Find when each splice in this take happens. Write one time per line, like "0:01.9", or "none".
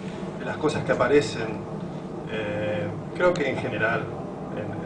0:02.5